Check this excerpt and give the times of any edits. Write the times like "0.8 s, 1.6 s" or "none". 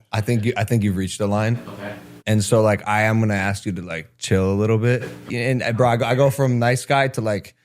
5.2 s